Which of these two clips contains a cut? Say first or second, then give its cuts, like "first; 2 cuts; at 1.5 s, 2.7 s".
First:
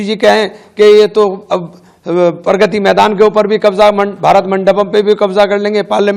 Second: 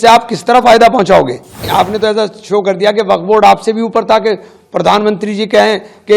second; 1 cut; at 1.6 s